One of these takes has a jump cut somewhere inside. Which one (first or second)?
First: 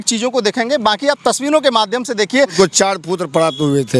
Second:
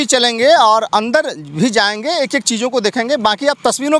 first